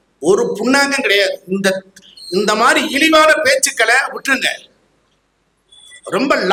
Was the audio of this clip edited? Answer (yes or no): no